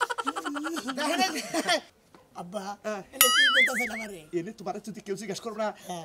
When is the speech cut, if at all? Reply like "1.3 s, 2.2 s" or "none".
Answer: 2.0 s